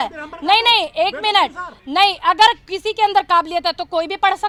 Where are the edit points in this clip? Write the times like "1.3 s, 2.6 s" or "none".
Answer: none